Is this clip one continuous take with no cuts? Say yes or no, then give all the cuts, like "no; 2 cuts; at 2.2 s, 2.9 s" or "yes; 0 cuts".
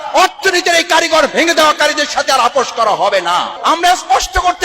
no; 1 cut; at 3.5 s